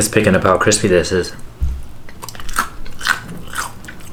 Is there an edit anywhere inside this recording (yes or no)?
no